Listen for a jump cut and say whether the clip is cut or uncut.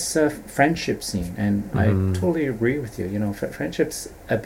uncut